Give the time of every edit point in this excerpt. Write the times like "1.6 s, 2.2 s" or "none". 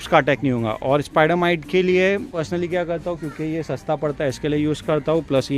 2.4 s